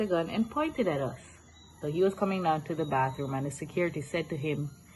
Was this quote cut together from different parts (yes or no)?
yes